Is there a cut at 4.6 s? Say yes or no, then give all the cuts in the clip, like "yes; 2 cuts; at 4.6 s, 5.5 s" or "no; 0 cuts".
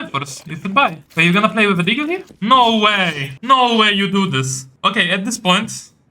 yes; 4 cuts; at 1.0 s, 2.3 s, 3.3 s, 4.6 s